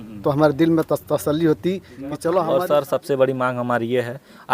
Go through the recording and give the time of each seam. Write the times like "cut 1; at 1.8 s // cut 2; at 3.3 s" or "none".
cut 1; at 2.4 s

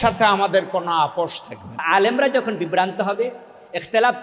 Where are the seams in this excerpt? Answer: cut 1; at 1.8 s

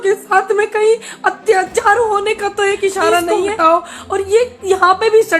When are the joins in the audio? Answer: cut 1; at 3.5 s

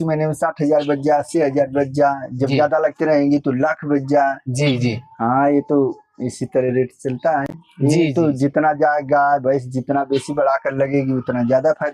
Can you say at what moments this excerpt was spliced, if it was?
none

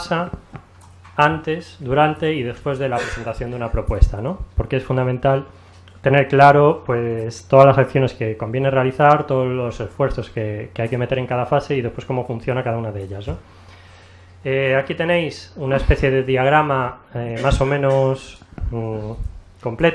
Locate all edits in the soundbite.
cut 1; at 15.7 s

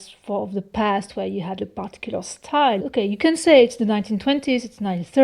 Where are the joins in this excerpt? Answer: cut 1; at 1.6 s // cut 2; at 2.8 s

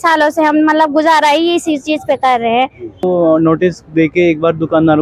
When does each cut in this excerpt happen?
cut 1; at 3.0 s

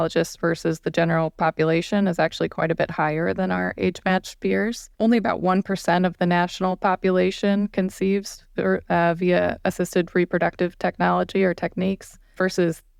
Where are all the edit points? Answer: none

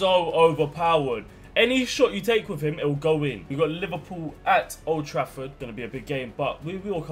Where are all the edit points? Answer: cut 1; at 3.4 s // cut 2; at 5.6 s

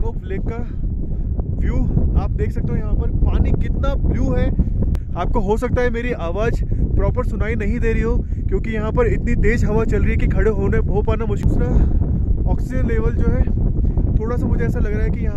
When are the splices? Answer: cut 1; at 5.0 s // cut 2; at 11.4 s

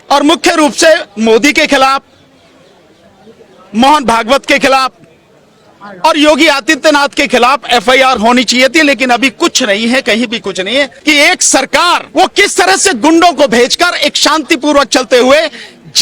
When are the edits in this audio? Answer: cut 1; at 10.9 s // cut 2; at 12.1 s

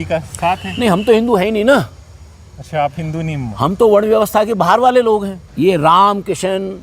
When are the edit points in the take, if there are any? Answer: cut 1; at 5.4 s

